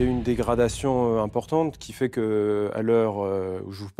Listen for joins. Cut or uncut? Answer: uncut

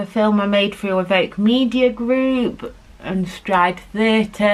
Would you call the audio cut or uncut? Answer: uncut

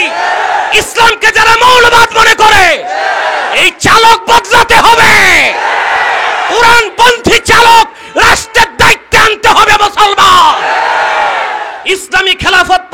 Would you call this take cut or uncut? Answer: cut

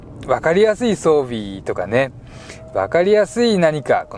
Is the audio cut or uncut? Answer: uncut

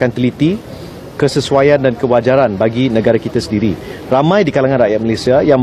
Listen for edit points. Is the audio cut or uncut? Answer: uncut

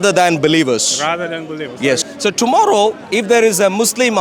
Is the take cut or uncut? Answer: cut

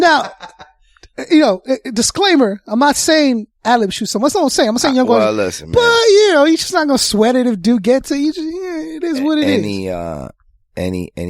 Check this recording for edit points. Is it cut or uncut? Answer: uncut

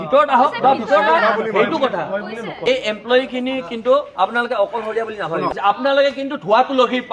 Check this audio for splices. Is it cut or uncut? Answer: uncut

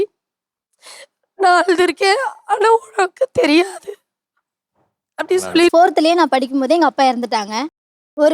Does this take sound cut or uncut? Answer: cut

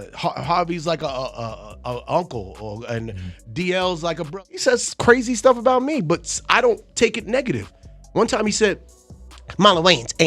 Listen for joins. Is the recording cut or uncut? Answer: cut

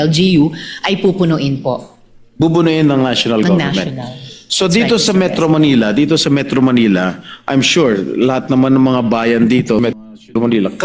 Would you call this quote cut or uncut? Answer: cut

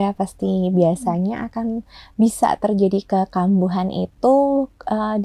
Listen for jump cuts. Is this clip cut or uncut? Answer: uncut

